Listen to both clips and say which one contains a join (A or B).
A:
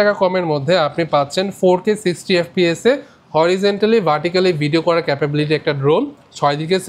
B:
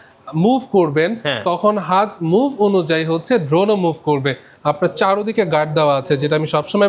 B